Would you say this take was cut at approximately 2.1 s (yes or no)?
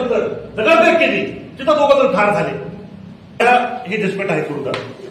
no